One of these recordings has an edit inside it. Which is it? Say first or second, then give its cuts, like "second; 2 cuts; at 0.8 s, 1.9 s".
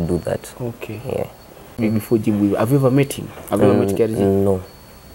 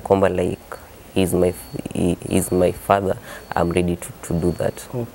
first; 1 cut; at 1.7 s